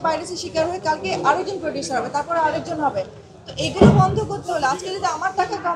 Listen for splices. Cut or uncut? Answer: uncut